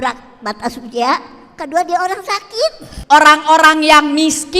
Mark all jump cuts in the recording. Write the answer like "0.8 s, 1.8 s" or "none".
2.9 s